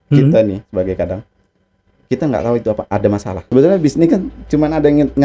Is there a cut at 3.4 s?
yes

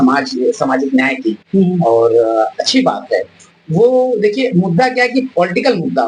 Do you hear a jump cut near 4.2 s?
no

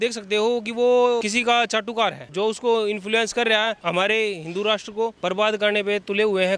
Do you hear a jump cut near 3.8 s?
yes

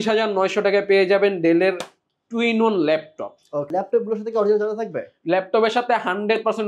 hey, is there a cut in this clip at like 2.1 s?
no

